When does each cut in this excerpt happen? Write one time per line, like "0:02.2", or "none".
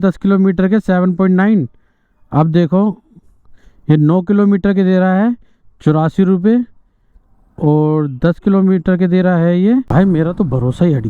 0:09.9